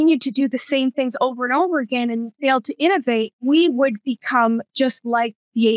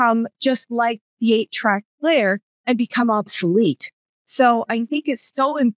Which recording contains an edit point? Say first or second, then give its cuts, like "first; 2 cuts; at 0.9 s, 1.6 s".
first; 2 cuts; at 2.3 s, 3.4 s